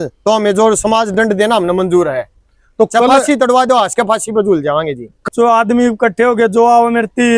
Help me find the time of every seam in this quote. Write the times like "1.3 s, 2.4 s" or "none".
5.1 s

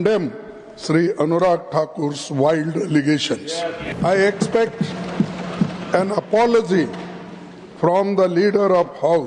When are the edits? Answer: 4.0 s

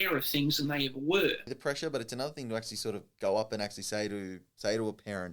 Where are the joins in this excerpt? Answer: 1.5 s

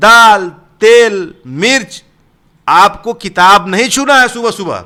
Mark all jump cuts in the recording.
none

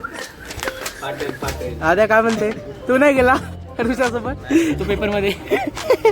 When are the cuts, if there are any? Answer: 1.7 s

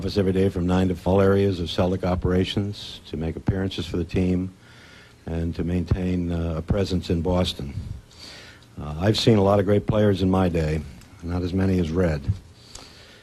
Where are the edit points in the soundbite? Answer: none

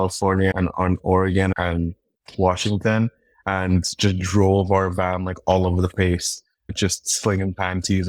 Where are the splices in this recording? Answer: none

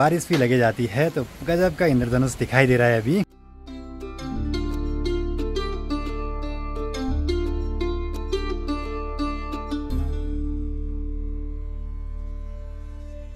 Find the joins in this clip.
none

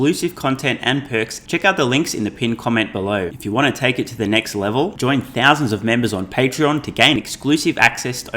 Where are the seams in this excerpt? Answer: 1.4 s, 3.3 s

